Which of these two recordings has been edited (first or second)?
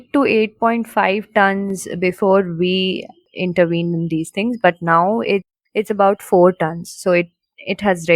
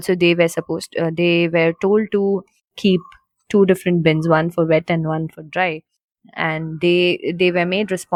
first